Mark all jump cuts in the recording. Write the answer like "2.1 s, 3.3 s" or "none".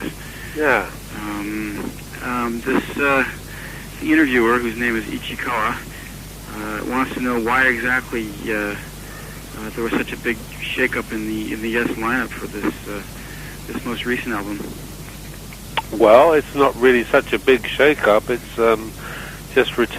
16.2 s

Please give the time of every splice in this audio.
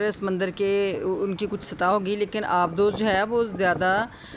none

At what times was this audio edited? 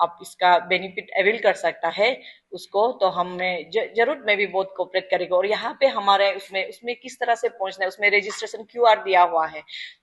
none

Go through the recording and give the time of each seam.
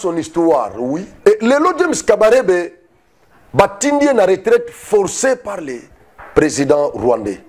1.1 s

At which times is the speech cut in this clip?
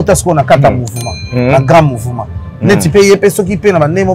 none

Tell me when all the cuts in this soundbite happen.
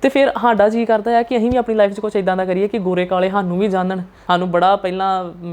4.1 s

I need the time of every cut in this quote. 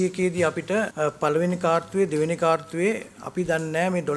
0.9 s

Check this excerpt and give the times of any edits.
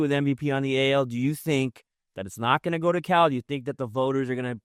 none

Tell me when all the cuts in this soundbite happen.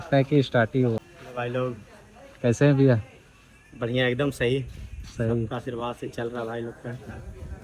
1.0 s

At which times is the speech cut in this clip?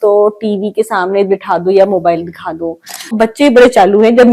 3.1 s

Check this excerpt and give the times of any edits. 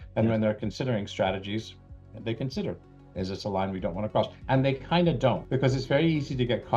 4.4 s, 5.5 s

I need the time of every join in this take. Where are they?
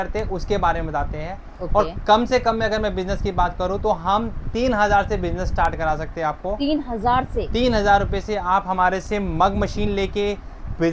none

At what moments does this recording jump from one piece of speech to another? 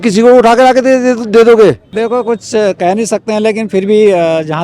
1.9 s

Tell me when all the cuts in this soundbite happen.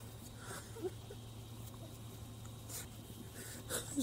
2.8 s

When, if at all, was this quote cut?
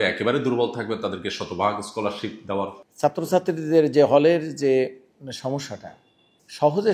2.8 s

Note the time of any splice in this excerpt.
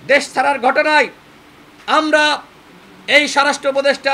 none

